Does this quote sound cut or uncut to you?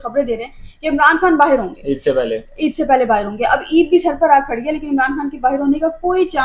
uncut